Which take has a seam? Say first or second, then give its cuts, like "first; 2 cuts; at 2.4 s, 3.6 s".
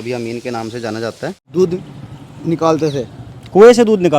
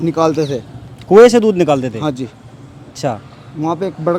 first; 1 cut; at 1.4 s